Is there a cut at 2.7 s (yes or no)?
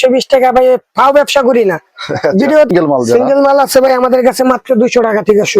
yes